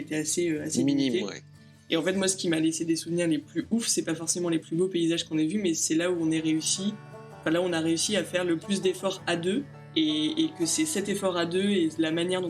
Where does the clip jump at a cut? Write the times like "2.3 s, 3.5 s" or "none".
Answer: 9.8 s